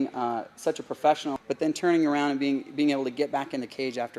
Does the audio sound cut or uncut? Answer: cut